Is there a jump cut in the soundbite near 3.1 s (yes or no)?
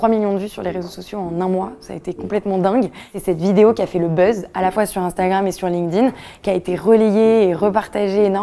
yes